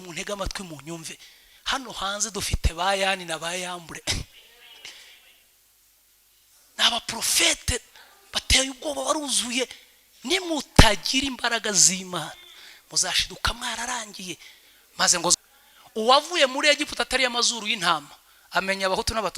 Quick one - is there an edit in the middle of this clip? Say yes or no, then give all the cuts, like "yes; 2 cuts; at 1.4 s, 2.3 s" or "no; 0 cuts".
yes; 1 cut; at 15.3 s